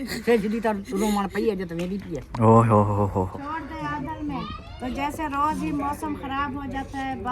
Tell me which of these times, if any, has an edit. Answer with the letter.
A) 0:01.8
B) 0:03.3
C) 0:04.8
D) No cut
B